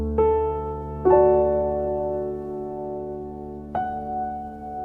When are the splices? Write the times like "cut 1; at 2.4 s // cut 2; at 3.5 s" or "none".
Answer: cut 1; at 2.6 s